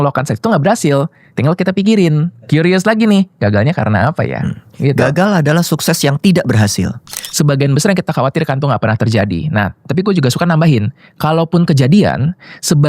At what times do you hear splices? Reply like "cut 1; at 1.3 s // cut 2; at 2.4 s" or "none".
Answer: cut 1; at 7.2 s

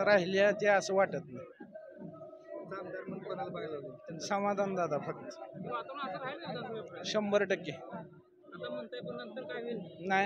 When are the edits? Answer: none

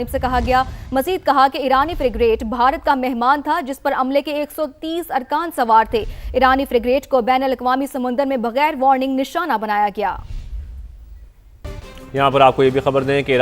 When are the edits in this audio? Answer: cut 1; at 11.7 s

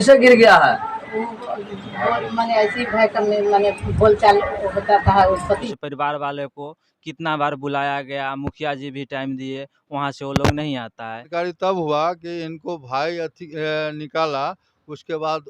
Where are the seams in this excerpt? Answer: cut 1; at 5.7 s // cut 2; at 11.3 s

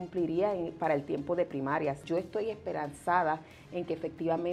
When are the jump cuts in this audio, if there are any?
cut 1; at 2.0 s

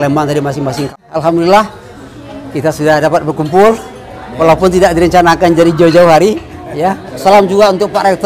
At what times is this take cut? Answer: cut 1; at 0.9 s // cut 2; at 7.1 s

